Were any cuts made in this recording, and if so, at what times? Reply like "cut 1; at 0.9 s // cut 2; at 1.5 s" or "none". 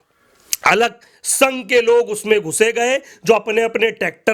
none